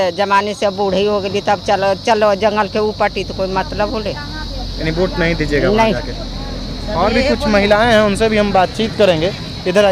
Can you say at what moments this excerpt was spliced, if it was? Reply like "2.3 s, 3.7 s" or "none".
none